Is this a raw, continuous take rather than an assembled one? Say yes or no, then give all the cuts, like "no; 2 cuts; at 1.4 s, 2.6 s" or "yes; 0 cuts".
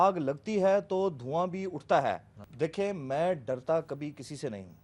no; 1 cut; at 2.4 s